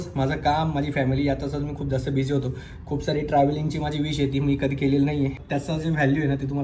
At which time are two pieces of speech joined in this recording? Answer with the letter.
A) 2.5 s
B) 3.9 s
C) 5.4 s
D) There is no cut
C